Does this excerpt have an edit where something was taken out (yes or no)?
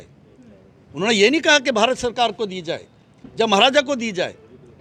no